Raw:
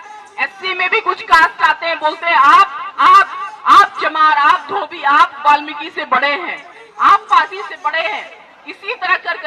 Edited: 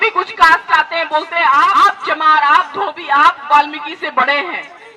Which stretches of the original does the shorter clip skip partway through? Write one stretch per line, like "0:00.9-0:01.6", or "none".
0:02.6-0:03.7